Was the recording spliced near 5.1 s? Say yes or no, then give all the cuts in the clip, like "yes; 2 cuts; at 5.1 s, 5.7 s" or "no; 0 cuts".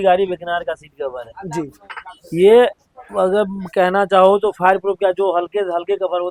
no; 0 cuts